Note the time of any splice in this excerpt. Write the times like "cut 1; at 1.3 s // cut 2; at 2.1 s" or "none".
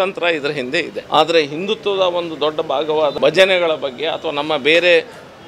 cut 1; at 1.0 s // cut 2; at 3.1 s